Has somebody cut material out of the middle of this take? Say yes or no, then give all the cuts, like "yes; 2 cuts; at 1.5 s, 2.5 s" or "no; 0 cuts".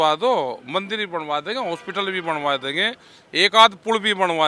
no; 0 cuts